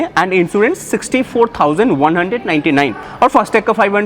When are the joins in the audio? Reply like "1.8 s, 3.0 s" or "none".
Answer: 3.0 s